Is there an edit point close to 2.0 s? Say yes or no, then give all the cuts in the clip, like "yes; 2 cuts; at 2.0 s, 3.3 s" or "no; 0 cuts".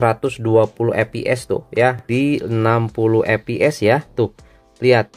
yes; 1 cut; at 2.0 s